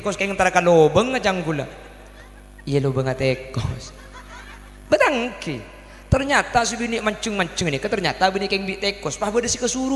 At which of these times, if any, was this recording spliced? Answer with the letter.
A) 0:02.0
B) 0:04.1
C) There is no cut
C